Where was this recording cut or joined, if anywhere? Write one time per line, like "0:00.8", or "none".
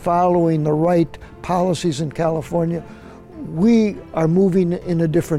none